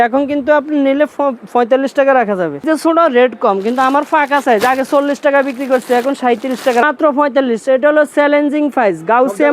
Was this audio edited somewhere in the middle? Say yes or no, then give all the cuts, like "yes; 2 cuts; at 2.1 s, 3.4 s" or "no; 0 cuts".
yes; 2 cuts; at 2.6 s, 6.8 s